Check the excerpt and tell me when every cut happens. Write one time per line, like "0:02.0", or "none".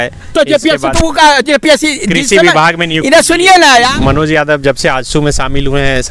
0:03.9